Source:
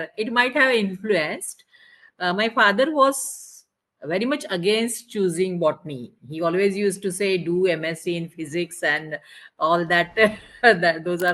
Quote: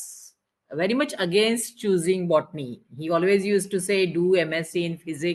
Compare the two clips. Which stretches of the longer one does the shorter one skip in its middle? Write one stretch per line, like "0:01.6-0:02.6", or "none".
none